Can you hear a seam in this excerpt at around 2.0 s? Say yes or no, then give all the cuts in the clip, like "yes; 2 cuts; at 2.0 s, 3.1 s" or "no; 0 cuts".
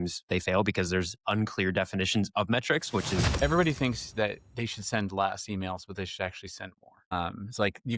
no; 1 cut; at 3.3 s